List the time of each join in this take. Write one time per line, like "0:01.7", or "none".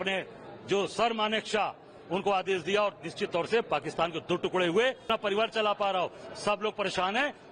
0:05.1